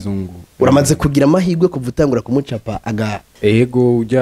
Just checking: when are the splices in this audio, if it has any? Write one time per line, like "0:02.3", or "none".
0:03.2